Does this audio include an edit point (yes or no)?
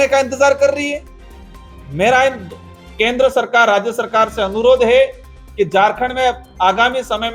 no